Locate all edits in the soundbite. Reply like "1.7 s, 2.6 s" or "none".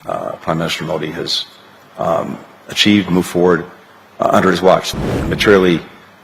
4.9 s